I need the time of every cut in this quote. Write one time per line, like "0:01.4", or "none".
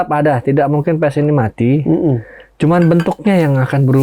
none